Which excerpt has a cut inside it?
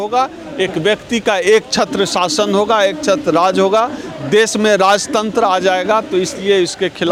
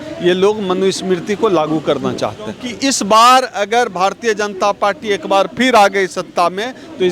second; 1 cut; at 2.6 s

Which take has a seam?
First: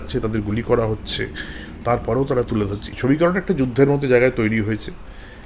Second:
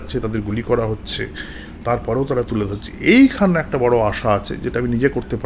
first; 1 cut; at 2.9 s

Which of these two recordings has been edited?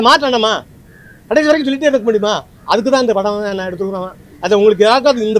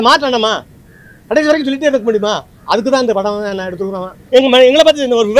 second; 1 cut; at 4.2 s

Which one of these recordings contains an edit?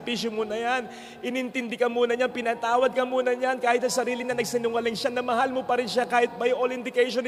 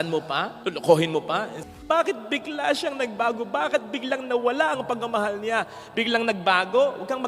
second; 1 cut; at 1.6 s

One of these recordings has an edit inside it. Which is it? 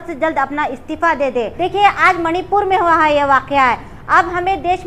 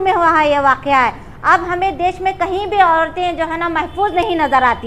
first; 1 cut; at 1.5 s

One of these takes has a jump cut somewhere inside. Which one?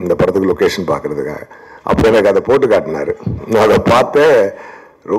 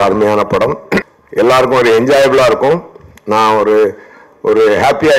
second; 1 cut; at 1.0 s

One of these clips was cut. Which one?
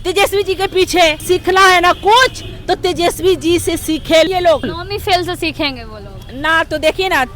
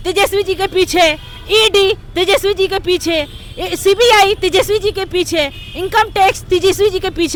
first; 2 cuts; at 1.2 s, 4.3 s

